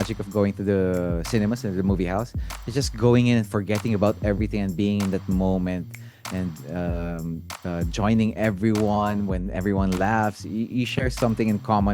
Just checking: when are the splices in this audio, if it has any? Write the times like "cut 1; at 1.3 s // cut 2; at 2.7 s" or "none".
none